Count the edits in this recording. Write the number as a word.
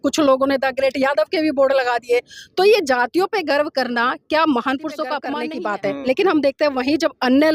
one